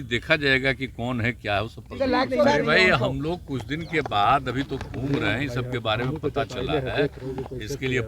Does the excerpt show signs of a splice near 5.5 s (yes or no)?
no